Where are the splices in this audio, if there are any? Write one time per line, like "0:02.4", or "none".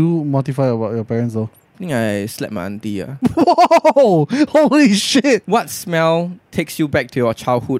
0:05.4